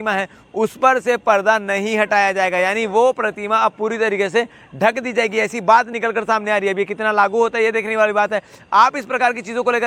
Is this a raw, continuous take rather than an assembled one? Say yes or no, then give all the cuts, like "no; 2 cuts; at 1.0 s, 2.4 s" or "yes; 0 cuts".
yes; 0 cuts